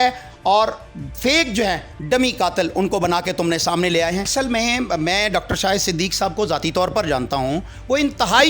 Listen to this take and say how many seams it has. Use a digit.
1